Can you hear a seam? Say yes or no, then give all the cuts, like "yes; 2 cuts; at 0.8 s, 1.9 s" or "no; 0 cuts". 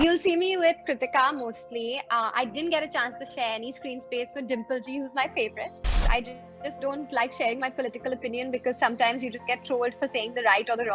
yes; 1 cut; at 5.9 s